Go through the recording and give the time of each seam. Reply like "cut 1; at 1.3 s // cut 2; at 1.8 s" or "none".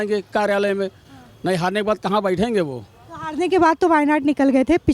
none